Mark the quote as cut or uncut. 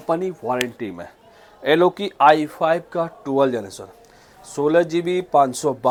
uncut